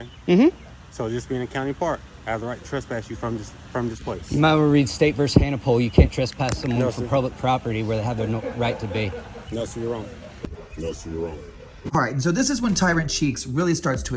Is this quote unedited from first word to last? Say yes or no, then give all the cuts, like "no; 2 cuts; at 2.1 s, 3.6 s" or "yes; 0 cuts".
yes; 0 cuts